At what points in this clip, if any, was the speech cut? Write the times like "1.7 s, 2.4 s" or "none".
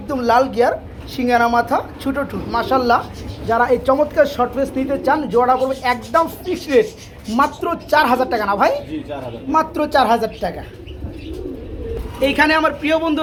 none

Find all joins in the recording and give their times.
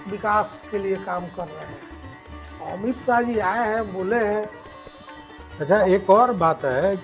none

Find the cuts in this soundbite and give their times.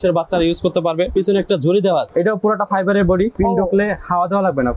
1.1 s, 2.1 s, 3.3 s

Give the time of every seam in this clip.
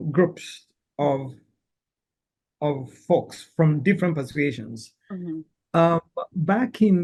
none

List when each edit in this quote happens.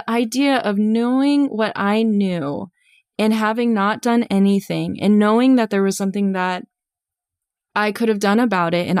none

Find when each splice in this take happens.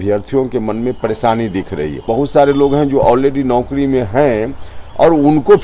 2.0 s

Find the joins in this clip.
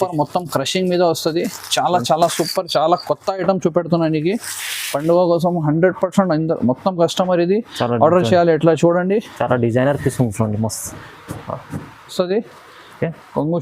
12.1 s

